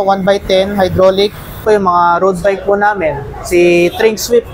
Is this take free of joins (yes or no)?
no